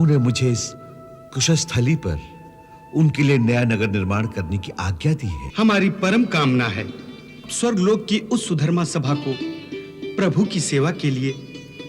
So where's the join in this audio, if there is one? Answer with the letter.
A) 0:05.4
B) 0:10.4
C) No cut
A